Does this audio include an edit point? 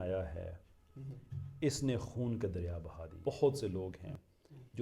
yes; 1 cut; at 3.2 s

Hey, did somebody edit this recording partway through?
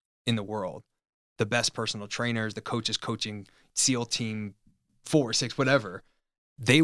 yes; 2 cuts; at 3.7 s, 4.9 s

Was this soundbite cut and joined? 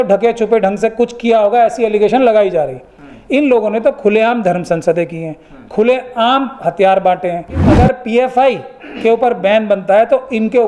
yes; 1 cut; at 7.7 s

